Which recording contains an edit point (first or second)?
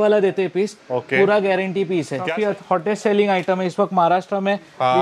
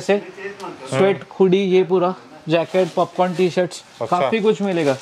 first